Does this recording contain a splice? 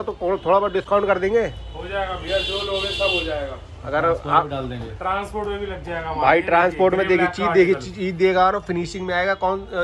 no; 0 cuts

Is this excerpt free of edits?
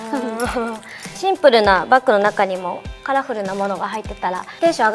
no; 1 cut; at 1.1 s

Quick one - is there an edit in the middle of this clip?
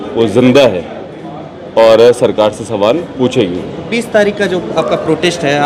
no; 0 cuts

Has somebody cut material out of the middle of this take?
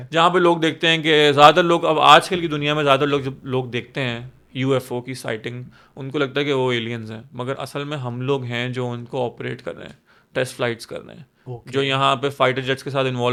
no; 0 cuts

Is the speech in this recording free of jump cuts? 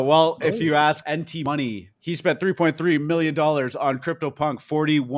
no; 2 cuts; at 1.0 s, 1.9 s

